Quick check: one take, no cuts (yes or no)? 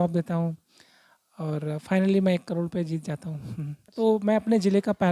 no